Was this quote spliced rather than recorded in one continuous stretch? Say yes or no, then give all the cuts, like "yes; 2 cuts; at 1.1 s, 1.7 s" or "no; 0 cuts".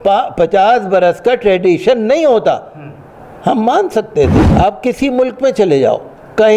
yes; 1 cut; at 4.4 s